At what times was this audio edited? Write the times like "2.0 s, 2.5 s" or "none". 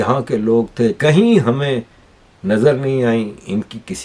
1.0 s